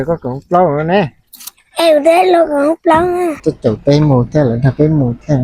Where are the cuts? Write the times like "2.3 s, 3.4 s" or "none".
3.4 s